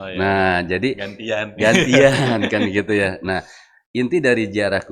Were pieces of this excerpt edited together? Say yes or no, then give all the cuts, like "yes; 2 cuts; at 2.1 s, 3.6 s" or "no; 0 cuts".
no; 0 cuts